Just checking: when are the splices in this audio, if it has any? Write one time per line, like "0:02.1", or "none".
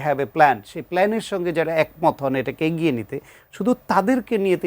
none